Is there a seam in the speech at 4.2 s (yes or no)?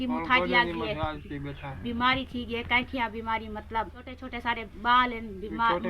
yes